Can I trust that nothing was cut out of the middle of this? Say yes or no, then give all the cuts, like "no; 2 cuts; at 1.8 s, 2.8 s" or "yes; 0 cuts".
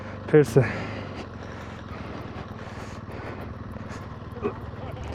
yes; 0 cuts